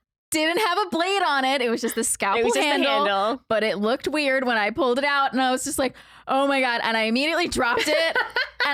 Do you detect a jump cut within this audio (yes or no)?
no